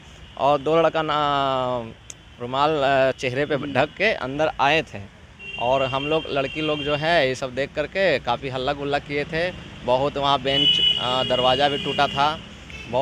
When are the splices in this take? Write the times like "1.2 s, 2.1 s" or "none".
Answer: none